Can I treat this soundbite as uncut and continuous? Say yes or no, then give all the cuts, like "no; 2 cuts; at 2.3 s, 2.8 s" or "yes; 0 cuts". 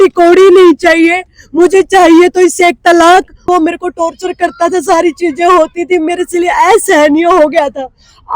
no; 1 cut; at 3.5 s